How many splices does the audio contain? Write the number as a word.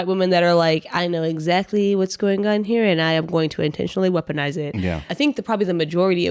one